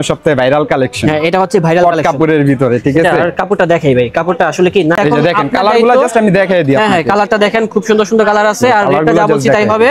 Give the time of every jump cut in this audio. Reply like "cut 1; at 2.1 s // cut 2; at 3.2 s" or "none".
cut 1; at 5.0 s